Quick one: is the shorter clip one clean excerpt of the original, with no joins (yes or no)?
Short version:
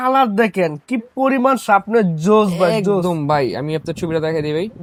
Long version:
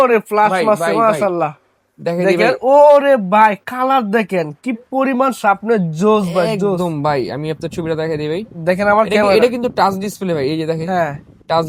yes